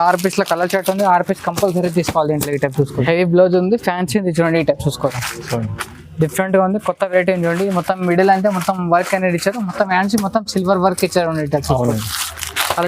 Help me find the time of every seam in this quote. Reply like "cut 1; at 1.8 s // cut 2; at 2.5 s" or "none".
cut 1; at 3.0 s